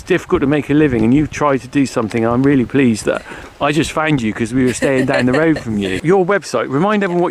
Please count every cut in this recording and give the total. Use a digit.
1